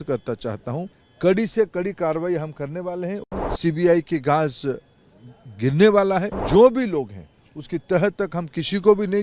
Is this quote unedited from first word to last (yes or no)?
no